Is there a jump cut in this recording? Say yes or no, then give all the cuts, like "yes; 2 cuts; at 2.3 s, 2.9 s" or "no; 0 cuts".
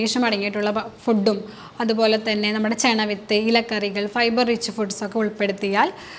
no; 0 cuts